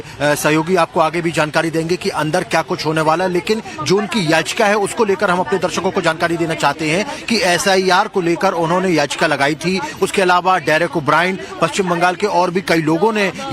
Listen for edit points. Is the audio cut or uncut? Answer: uncut